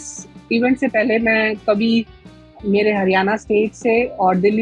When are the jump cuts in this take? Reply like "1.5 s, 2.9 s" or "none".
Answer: none

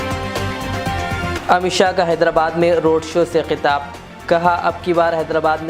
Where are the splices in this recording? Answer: 1.3 s

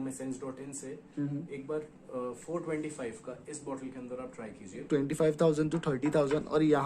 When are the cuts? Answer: 4.8 s

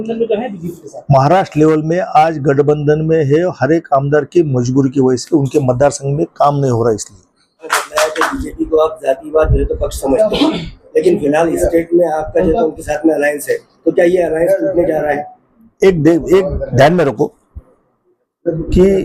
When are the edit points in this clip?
7.6 s

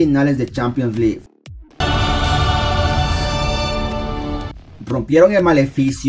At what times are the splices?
1.4 s, 4.5 s

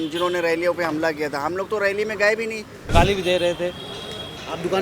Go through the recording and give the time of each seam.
2.7 s

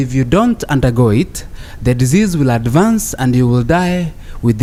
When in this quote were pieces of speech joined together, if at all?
none

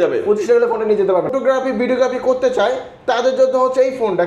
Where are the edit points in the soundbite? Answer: 1.3 s

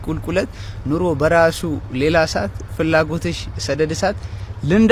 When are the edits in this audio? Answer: none

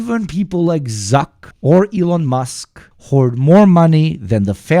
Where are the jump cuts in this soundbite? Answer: 1.4 s

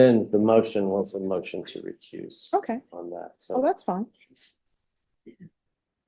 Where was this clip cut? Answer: none

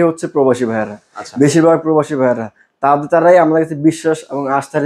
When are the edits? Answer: none

